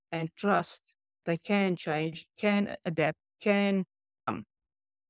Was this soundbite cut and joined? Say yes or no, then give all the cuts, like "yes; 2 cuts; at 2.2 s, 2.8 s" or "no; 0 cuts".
yes; 3 cuts; at 1.2 s, 2.3 s, 3.4 s